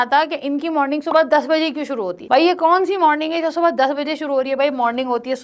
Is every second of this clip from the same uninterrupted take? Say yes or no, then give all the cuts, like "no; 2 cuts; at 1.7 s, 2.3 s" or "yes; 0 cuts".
yes; 0 cuts